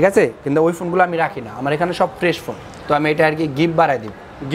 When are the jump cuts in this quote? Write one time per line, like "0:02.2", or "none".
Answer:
0:02.7